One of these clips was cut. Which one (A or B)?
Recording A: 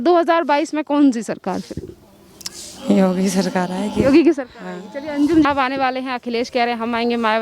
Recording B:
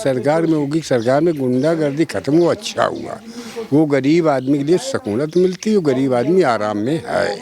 A